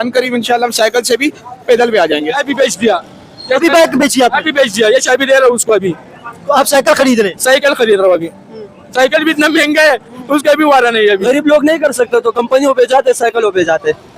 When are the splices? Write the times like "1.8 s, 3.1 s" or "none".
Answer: 2.4 s, 11.2 s